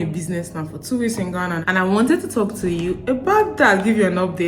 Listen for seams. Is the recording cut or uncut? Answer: cut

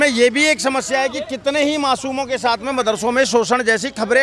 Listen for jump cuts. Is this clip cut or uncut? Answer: uncut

